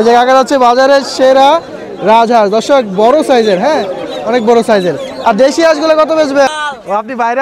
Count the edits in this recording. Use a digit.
1